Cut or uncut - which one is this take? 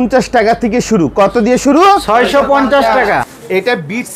cut